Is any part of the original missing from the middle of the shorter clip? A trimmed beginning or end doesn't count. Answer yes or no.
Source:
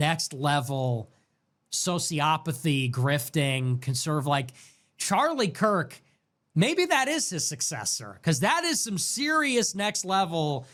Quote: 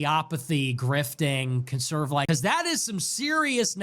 yes